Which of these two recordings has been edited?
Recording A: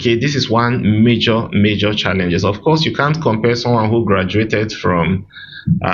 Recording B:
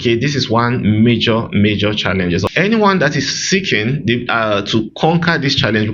B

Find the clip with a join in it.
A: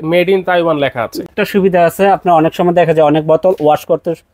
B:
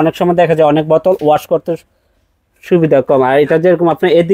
A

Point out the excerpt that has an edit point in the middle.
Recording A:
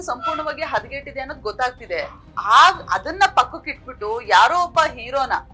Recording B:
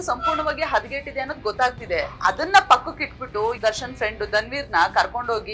B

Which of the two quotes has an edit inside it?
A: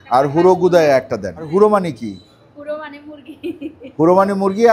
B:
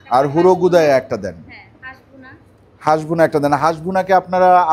A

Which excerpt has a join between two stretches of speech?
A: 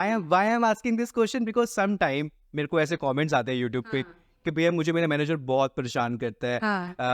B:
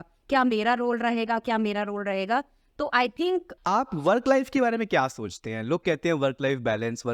B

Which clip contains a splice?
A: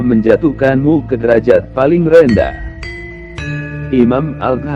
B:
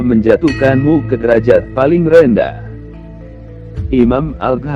A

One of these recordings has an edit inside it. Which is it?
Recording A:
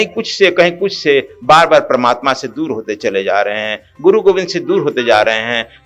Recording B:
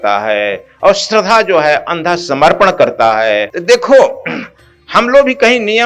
B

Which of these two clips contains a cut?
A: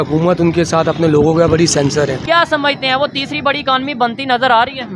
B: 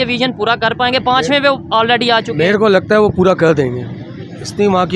A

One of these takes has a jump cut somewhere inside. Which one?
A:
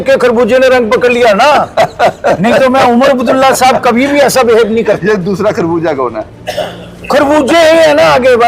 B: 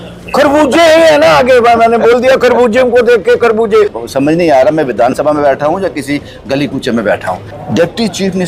B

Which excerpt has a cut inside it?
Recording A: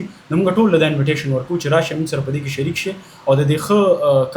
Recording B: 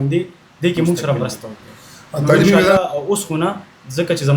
B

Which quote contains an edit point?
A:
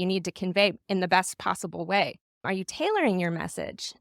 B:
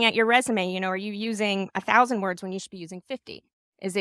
A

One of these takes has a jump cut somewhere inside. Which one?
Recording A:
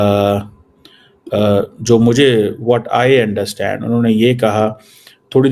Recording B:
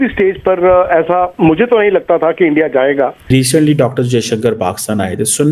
B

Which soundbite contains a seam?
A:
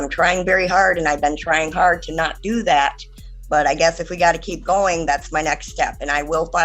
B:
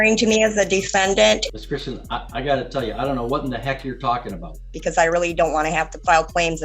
B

